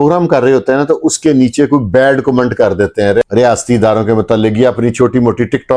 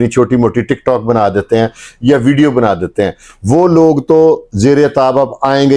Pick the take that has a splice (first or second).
first